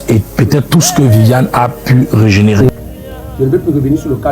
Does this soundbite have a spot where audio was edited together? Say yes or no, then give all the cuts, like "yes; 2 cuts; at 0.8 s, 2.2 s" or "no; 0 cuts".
yes; 1 cut; at 2.7 s